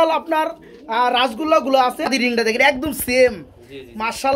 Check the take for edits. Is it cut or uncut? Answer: cut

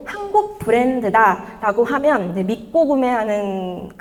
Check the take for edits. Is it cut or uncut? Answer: uncut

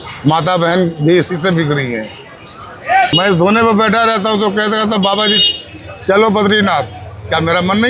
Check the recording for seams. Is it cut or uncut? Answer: cut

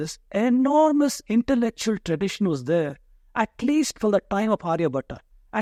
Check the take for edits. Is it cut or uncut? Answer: uncut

